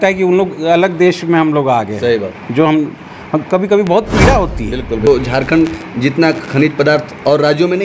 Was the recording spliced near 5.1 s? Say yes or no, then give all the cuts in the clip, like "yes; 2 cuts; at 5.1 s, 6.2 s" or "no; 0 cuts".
yes; 1 cut; at 5.1 s